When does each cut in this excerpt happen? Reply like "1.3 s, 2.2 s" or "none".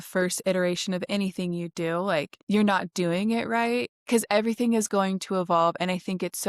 2.4 s, 4.0 s

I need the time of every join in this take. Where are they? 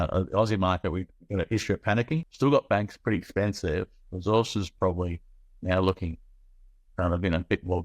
2.3 s

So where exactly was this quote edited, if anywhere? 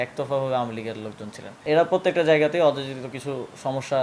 1.6 s

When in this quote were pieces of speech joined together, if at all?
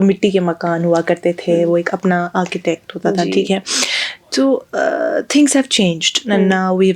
none

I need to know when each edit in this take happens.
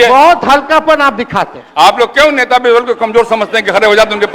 none

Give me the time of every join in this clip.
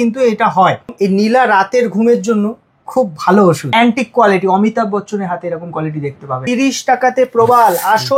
0.9 s, 3.7 s, 6.4 s

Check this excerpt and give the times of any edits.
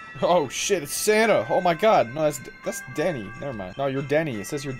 3.7 s

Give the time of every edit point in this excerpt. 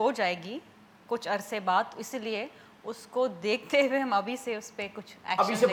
none

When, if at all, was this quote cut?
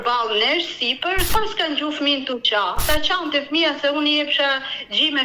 1.3 s, 2.8 s

